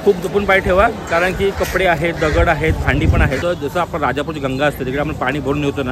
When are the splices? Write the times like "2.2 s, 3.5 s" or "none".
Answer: 3.4 s

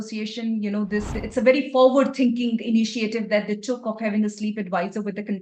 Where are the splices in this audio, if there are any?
1.2 s

